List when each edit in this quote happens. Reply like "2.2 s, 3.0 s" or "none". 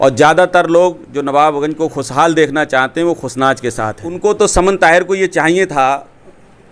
4.2 s